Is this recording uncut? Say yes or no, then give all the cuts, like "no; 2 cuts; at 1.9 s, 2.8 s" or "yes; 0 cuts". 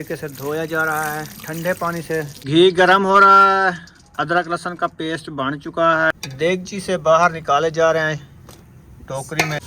no; 2 cuts; at 2.5 s, 6.1 s